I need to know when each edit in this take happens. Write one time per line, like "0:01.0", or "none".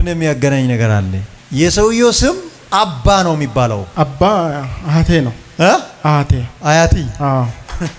none